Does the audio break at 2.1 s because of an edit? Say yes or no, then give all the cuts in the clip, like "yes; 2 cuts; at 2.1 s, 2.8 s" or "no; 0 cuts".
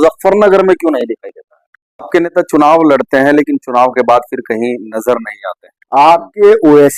yes; 2 cuts; at 2.1 s, 5.9 s